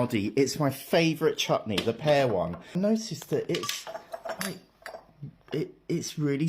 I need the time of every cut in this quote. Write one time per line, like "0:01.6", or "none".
0:02.6